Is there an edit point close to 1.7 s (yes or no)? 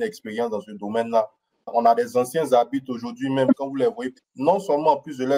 yes